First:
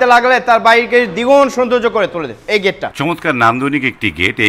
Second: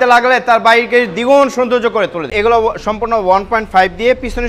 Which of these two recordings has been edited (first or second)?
second